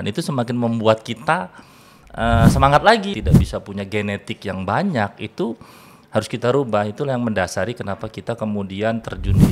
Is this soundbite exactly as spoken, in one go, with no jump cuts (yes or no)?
no